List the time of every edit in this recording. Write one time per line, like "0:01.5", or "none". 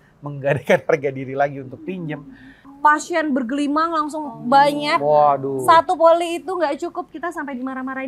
0:02.7